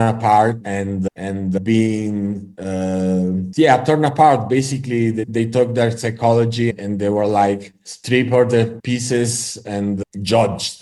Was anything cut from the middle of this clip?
no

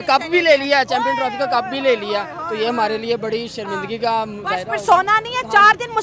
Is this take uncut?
yes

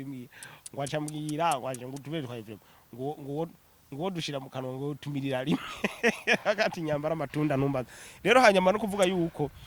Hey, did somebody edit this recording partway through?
no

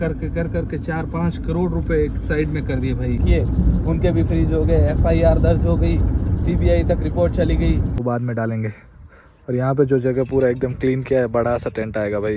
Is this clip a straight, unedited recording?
no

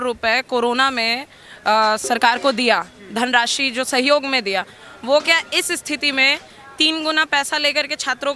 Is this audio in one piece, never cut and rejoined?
yes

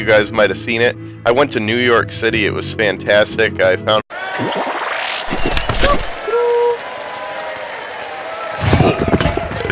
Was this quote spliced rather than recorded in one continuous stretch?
no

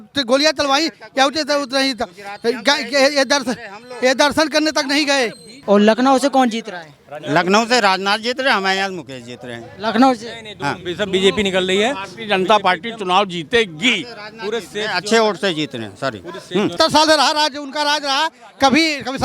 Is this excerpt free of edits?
no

